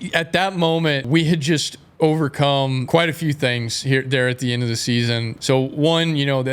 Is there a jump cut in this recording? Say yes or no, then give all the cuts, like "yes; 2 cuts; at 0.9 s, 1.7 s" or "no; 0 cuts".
yes; 3 cuts; at 1.1 s, 2.8 s, 5.3 s